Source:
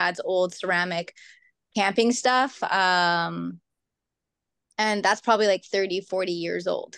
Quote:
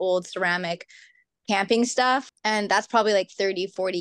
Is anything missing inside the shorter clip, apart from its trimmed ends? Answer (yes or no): yes